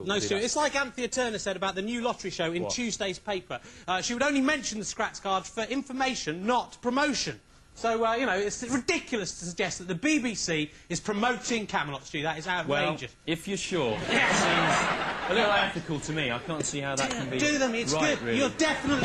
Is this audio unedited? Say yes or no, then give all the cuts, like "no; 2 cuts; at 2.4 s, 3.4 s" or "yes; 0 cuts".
no; 1 cut; at 11.7 s